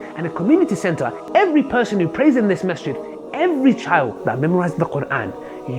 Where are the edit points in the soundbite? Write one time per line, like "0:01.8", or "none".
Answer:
0:01.2